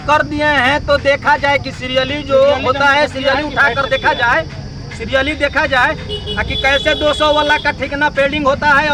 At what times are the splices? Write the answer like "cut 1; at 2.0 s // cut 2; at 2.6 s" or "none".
none